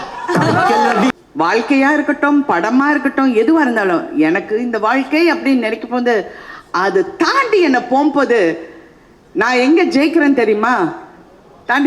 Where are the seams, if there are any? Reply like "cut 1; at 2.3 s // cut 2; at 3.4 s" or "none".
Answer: cut 1; at 1.1 s

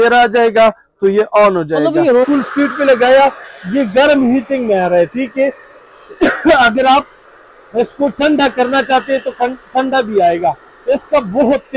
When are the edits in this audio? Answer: cut 1; at 2.3 s

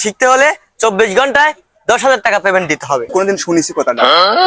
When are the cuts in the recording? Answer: cut 1; at 3.1 s

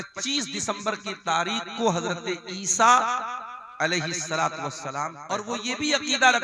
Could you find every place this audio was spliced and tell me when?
cut 1; at 5.4 s

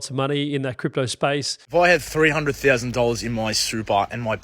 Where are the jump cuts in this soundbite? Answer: cut 1; at 1.5 s

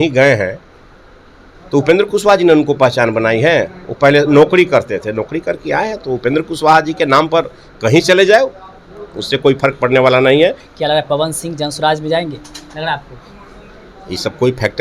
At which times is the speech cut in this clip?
cut 1; at 10.7 s

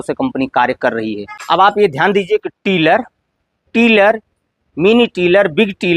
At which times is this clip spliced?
cut 1; at 1.3 s

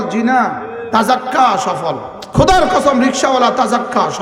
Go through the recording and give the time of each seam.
cut 1; at 2.2 s

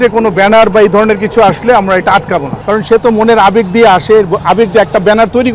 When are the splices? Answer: cut 1; at 2.6 s

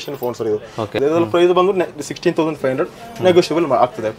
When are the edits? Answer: cut 1; at 1.0 s

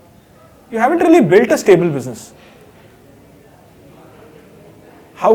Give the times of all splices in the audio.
none

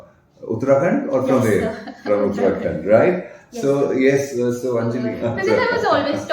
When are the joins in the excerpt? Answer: cut 1; at 5.1 s

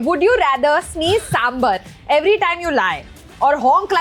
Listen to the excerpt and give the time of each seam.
none

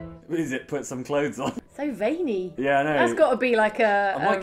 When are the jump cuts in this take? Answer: cut 1; at 1.5 s // cut 2; at 2.5 s

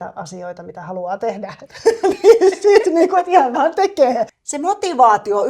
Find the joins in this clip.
cut 1; at 4.4 s

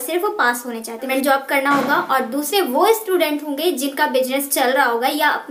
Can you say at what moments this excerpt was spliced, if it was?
cut 1; at 1.1 s

